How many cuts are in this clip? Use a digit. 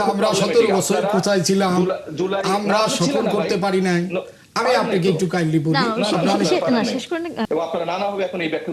1